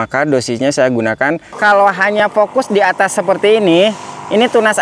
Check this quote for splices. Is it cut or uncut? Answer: cut